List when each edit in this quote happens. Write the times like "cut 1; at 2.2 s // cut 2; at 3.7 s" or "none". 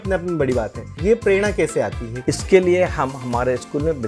cut 1; at 0.9 s // cut 2; at 2.1 s